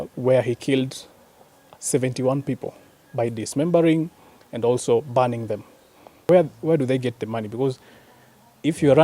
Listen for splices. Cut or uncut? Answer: cut